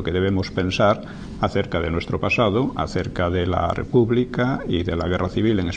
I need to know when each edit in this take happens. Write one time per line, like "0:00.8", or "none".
none